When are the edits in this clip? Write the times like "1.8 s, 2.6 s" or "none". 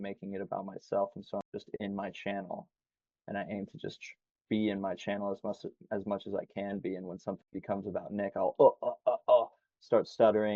none